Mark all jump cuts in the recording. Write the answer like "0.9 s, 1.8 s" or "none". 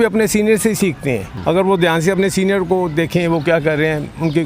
1.3 s